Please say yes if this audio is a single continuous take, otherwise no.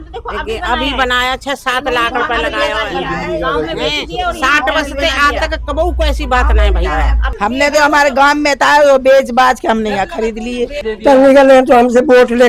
no